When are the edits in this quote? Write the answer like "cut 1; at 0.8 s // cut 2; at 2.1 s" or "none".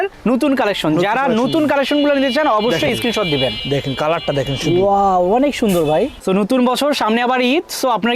cut 1; at 6.2 s